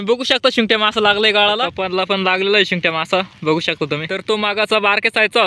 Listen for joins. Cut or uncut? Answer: cut